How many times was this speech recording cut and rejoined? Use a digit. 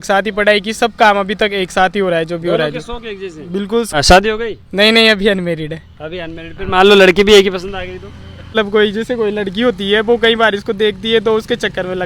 2